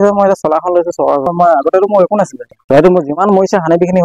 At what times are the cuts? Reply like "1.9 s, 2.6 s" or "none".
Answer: 1.3 s, 2.5 s